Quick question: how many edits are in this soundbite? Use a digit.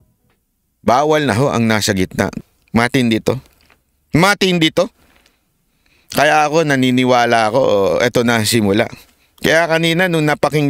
1